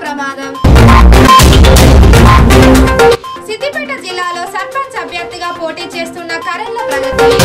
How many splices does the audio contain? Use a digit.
0